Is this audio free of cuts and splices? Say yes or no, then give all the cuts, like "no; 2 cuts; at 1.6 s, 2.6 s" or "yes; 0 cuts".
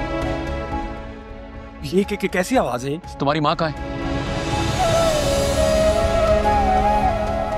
no; 2 cuts; at 1.0 s, 3.9 s